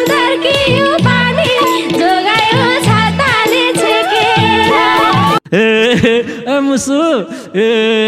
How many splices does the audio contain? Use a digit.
1